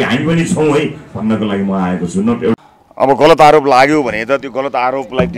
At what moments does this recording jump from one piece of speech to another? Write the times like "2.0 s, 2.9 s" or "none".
2.5 s